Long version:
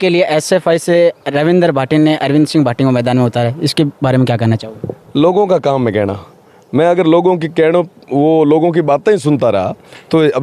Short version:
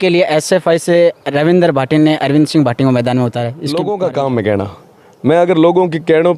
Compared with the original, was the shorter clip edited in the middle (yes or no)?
yes